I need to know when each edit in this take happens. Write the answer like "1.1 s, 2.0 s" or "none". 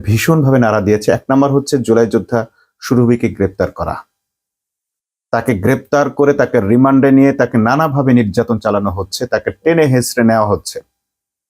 none